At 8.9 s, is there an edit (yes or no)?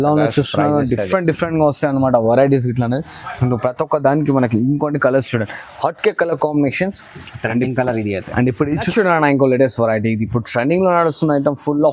yes